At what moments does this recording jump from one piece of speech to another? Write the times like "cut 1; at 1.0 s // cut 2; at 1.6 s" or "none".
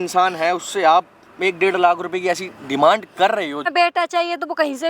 cut 1; at 3.7 s